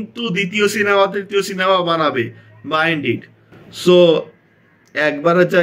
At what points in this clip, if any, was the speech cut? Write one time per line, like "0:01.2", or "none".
none